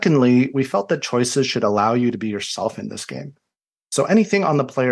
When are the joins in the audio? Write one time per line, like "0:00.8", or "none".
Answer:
none